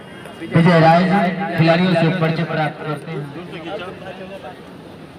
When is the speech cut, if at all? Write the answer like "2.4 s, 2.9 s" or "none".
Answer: 3.0 s